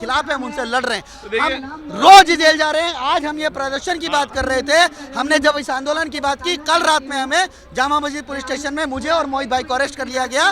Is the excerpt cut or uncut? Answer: uncut